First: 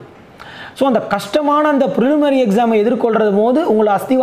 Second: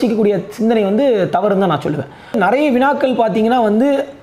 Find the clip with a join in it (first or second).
second